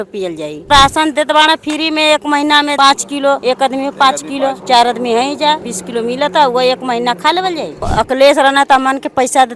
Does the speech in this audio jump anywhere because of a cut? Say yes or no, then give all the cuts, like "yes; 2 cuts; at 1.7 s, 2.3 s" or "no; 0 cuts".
yes; 5 cuts; at 0.7 s, 3.2 s, 4.6 s, 5.7 s, 7.8 s